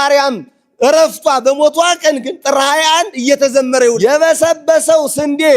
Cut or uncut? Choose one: cut